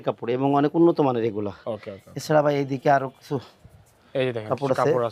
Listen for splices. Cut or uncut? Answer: uncut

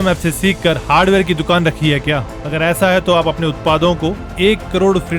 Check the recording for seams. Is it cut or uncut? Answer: uncut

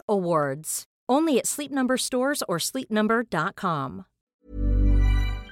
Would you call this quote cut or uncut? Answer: cut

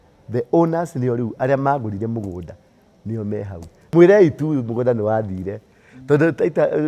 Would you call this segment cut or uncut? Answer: cut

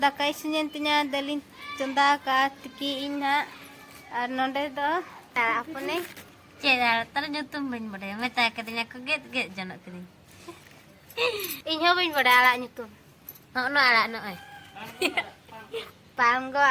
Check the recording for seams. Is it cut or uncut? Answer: cut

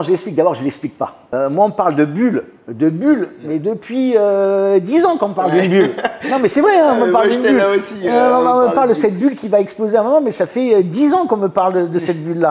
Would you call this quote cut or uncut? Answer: cut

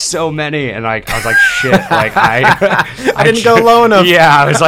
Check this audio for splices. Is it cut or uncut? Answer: uncut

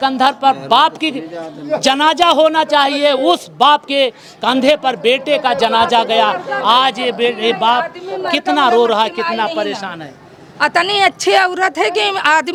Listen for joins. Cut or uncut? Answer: uncut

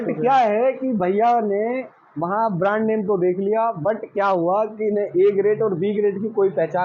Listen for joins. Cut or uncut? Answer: uncut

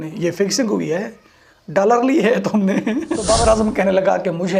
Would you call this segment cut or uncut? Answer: cut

